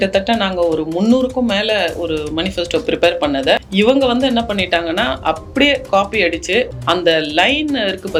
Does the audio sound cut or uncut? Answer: uncut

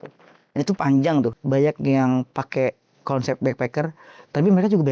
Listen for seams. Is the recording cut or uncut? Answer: cut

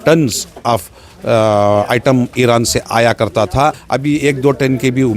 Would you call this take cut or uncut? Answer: cut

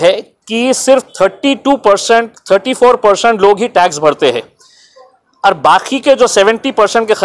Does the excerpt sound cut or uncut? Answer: uncut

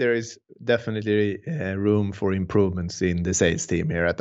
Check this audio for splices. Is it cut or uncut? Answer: uncut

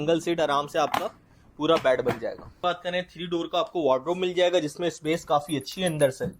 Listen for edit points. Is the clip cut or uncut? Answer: cut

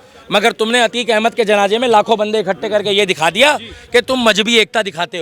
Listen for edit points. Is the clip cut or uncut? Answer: uncut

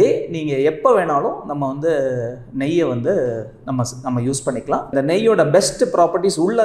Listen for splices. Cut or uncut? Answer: cut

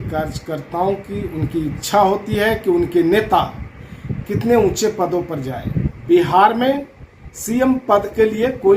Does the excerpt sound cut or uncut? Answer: cut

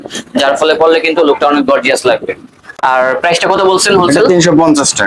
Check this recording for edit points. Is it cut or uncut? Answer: uncut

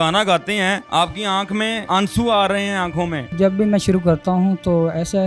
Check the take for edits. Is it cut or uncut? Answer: cut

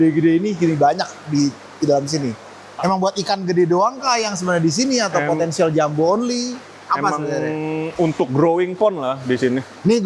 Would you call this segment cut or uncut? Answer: uncut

